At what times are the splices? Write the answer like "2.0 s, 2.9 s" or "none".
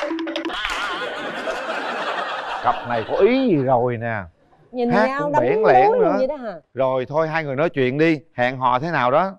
none